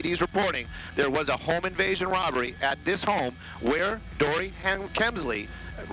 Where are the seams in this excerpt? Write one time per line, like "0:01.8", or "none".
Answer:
none